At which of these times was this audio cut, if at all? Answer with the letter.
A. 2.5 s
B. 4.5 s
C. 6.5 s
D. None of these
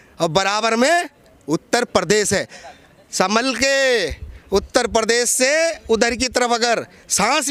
D